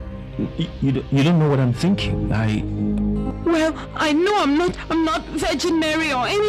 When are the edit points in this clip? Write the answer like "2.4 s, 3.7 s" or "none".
4.2 s